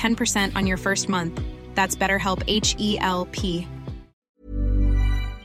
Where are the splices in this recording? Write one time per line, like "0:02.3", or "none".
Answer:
0:04.4